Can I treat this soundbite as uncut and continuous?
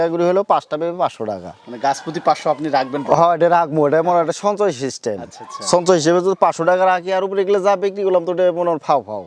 yes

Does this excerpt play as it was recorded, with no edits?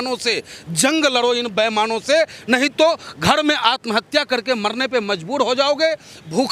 yes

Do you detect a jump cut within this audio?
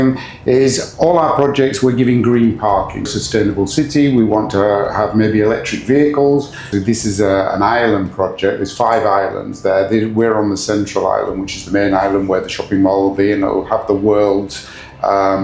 yes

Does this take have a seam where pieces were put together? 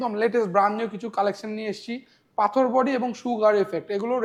no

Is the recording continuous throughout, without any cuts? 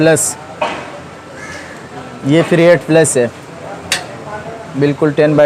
yes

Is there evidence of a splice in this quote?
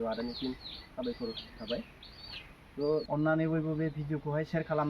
yes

